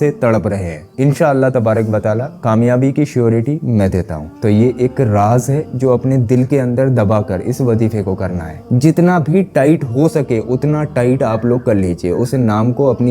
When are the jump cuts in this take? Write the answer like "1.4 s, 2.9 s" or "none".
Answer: 4.2 s, 8.5 s